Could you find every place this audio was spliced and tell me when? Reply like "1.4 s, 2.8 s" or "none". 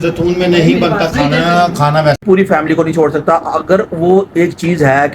2.2 s